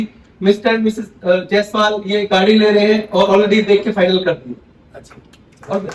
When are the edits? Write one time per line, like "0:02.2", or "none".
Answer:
none

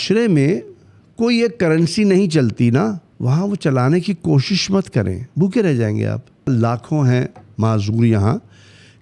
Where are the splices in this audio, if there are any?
0:03.1
0:05.2
0:06.5

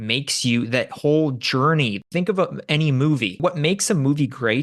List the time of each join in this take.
0:02.0
0:03.4

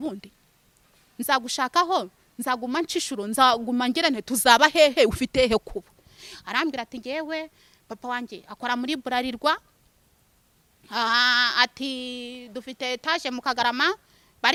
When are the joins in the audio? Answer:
none

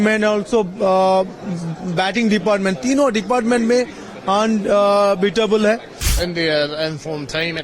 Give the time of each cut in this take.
0:06.1

